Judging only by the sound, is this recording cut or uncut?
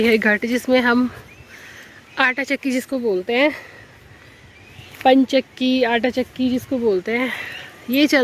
uncut